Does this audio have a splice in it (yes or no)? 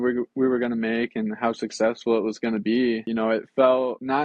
no